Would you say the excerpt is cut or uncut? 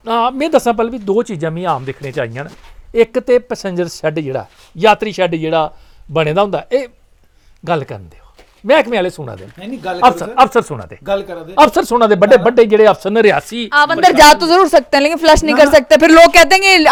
uncut